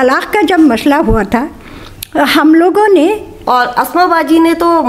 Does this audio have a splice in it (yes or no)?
yes